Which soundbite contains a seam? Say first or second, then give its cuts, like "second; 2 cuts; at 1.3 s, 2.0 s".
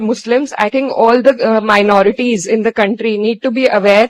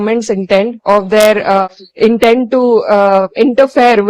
second; 1 cut; at 1.6 s